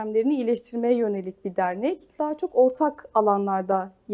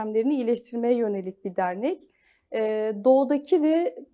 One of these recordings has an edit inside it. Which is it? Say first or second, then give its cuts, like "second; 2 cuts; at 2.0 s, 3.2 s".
first; 1 cut; at 2.2 s